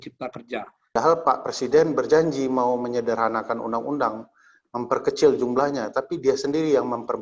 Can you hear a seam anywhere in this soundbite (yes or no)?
yes